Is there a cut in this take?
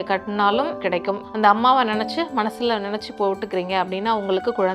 yes; 1 cut; at 1.1 s

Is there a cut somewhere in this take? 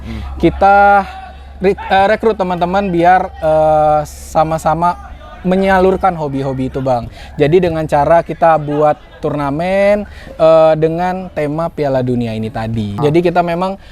yes; 1 cut; at 13.0 s

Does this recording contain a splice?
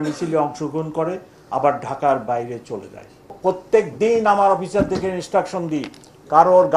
yes; 1 cut; at 3.3 s

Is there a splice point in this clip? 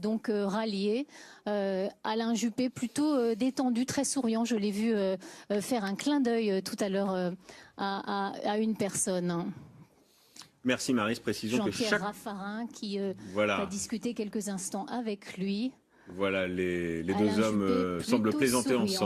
no; 0 cuts

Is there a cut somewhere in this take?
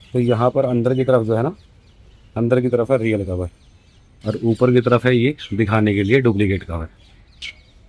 no; 0 cuts

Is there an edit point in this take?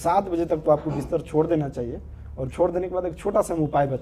no; 0 cuts

